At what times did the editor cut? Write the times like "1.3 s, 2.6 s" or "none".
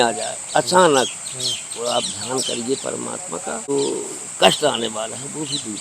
3.7 s